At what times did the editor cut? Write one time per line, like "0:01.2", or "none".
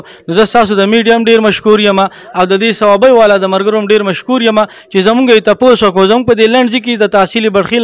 none